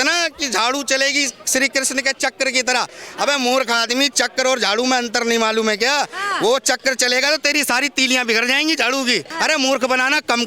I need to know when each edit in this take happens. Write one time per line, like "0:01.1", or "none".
0:09.3